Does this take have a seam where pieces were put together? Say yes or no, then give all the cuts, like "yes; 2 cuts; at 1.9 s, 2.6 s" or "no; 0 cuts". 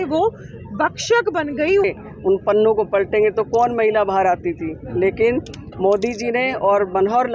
yes; 1 cut; at 1.8 s